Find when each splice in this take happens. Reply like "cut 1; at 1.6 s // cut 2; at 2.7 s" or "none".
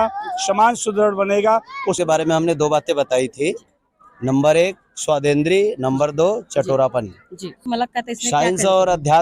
cut 1; at 2.0 s // cut 2; at 7.6 s